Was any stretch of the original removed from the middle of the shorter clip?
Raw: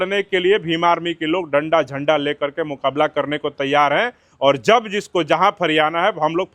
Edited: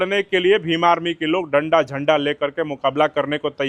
no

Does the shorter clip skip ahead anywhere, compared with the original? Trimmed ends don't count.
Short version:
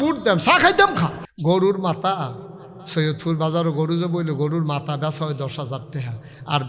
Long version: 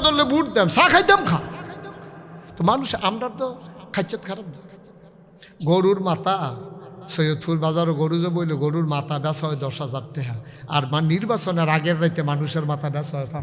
yes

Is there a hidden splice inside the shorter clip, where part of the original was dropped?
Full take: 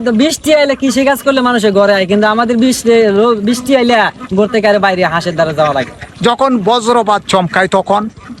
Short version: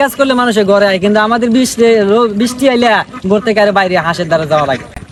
no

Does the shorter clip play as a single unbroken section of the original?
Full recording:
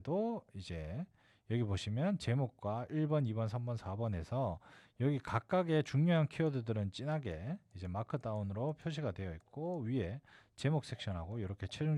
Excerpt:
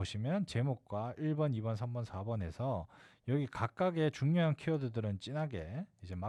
yes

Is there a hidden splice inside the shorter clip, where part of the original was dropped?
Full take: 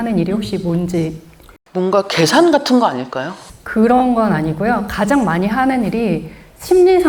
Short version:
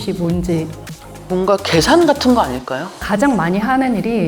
yes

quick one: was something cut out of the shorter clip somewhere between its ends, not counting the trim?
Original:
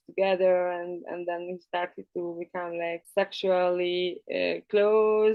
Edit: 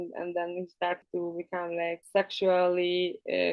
yes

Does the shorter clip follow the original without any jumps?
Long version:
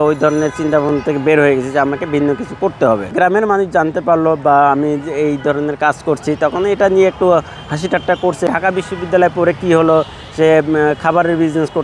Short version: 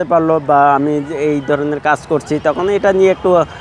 yes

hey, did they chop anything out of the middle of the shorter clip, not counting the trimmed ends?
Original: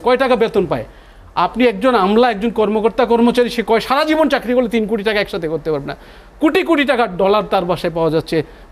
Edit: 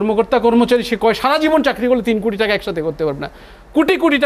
no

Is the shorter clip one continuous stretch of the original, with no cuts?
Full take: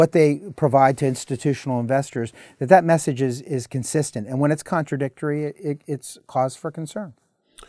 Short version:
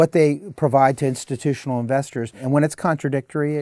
no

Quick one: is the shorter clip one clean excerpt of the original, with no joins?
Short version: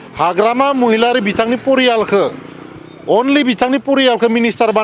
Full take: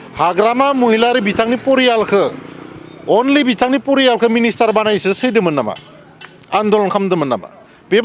yes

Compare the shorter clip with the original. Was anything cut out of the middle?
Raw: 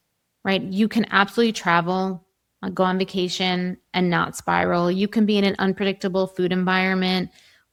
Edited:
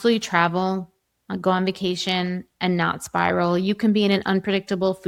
no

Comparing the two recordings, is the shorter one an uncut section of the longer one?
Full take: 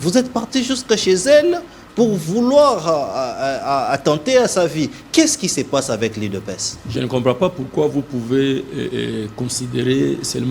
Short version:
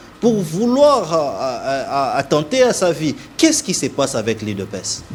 yes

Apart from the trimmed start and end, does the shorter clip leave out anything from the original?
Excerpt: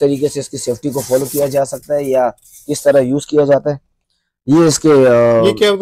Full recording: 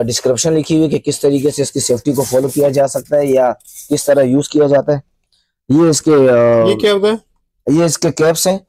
no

